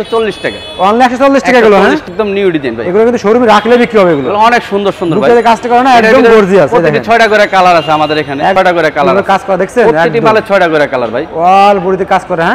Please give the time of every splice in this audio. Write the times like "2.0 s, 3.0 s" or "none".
2.1 s, 8.5 s